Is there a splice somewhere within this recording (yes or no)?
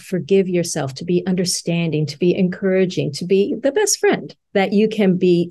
no